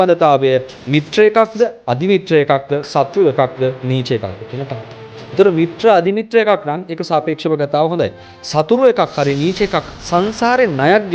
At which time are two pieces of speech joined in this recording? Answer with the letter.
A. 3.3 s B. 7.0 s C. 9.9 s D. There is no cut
C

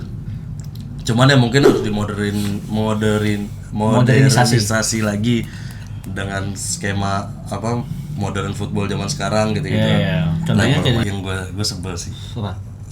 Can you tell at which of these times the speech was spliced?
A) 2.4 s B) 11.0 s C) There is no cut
B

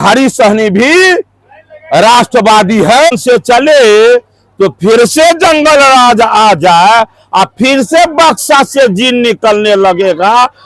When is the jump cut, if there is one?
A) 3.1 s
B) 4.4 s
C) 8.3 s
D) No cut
A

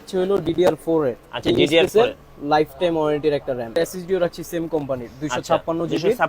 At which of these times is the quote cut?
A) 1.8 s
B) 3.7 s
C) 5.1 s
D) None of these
B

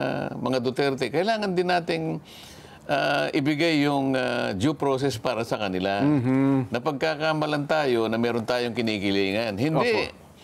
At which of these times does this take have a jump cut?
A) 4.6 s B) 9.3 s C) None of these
C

